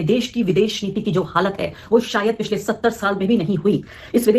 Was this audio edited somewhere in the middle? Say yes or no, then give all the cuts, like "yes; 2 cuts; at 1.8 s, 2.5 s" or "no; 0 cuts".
no; 0 cuts